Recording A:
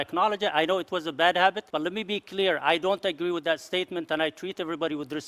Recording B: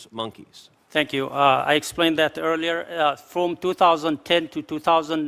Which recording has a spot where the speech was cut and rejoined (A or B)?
A